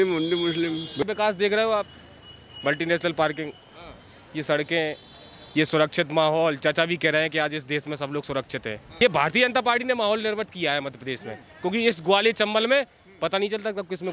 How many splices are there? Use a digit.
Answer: 2